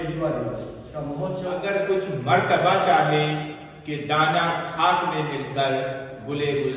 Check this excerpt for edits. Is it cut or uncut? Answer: cut